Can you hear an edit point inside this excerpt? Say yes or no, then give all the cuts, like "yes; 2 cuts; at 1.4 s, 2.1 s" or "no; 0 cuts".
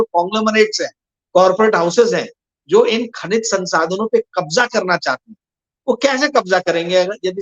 no; 0 cuts